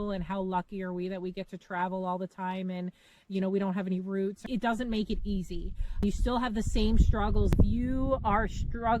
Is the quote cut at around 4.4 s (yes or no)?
yes